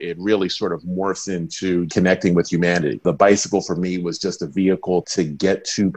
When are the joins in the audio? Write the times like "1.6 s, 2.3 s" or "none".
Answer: 1.9 s, 3.0 s, 5.1 s